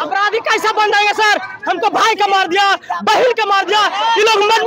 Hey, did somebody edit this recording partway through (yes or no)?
no